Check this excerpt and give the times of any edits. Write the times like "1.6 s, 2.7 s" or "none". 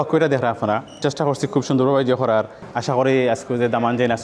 1.0 s, 2.6 s